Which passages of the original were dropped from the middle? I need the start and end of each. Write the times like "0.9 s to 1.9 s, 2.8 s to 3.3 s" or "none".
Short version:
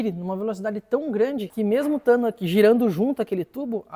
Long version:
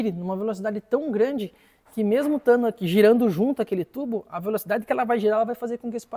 1.5 s to 1.9 s